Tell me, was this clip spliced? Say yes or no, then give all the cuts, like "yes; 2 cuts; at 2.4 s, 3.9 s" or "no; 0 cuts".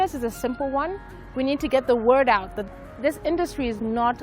yes; 1 cut; at 2.6 s